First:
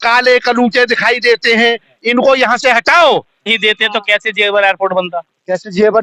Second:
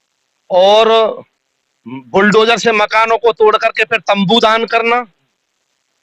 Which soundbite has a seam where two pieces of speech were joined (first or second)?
first